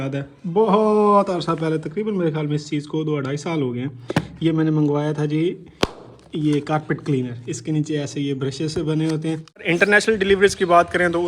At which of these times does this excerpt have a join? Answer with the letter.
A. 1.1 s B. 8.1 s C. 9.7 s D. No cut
C